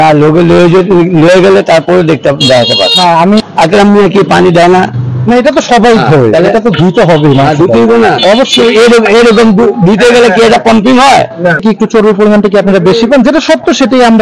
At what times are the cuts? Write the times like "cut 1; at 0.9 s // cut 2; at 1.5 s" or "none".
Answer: cut 1; at 3.4 s // cut 2; at 11.6 s

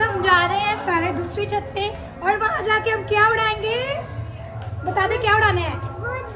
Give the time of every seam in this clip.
none

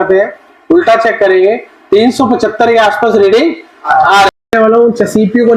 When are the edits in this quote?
cut 1; at 4.4 s

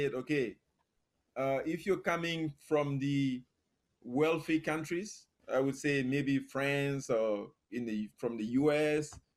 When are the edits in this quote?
none

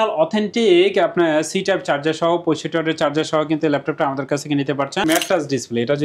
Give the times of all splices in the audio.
cut 1; at 5.0 s

